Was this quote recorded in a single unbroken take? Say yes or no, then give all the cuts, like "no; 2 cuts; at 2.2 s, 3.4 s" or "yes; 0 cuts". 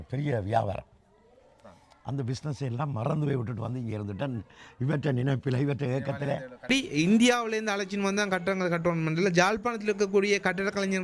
no; 1 cut; at 6.7 s